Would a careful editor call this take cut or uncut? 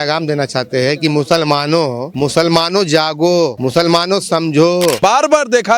cut